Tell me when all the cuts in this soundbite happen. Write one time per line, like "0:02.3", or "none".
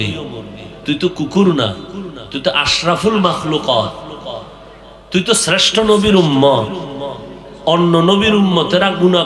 none